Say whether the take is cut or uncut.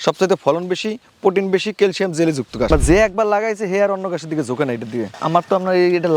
cut